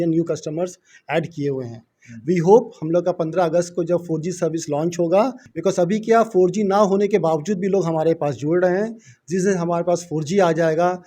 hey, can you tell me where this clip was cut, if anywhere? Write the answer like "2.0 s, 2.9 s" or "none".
5.5 s